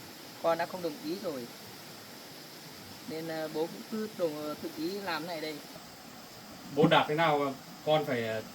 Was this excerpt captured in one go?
no; 1 cut; at 5.9 s

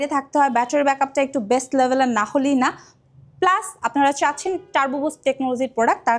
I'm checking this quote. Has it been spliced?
no; 0 cuts

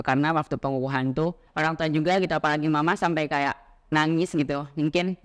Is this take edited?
yes; 1 cut; at 1.4 s

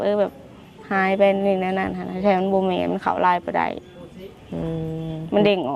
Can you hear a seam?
no; 0 cuts

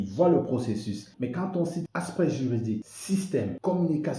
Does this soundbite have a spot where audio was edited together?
yes; 3 cuts; at 1.1 s, 1.8 s, 3.2 s

